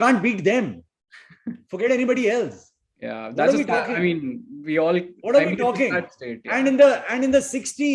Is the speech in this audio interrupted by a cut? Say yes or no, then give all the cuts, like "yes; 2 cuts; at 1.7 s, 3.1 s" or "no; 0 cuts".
no; 0 cuts